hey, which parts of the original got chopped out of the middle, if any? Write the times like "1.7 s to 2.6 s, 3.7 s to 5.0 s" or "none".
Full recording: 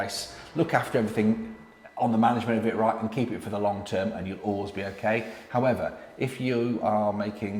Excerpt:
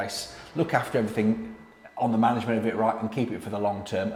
none